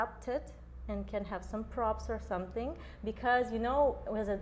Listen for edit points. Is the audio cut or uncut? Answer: uncut